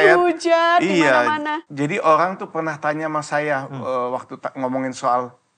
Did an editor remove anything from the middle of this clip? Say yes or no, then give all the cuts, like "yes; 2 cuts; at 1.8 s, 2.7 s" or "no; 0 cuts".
yes; 1 cut; at 1.6 s